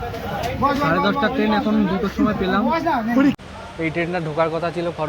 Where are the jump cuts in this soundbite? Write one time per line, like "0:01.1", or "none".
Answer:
0:03.4

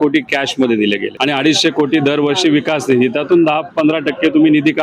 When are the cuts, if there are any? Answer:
0:01.1

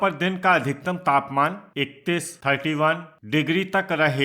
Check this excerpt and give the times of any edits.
0:01.7
0:03.1

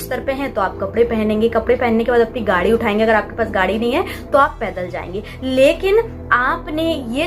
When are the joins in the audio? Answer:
none

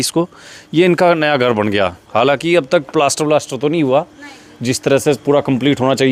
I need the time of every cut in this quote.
none

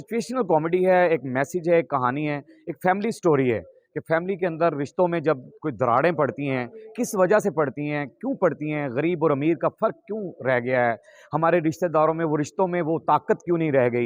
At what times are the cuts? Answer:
none

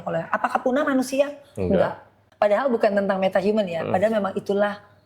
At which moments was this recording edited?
0:02.2

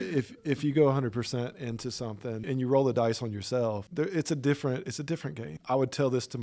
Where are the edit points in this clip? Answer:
0:02.4
0:03.9
0:05.5

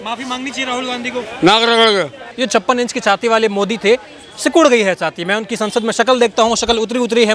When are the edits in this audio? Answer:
none

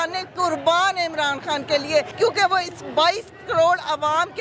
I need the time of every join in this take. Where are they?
0:02.1

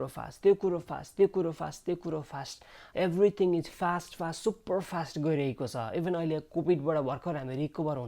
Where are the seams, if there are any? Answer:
0:02.8

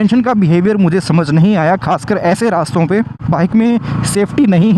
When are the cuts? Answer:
0:03.2

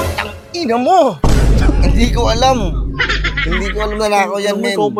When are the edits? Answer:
none

